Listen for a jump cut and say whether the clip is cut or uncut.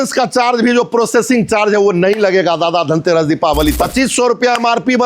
cut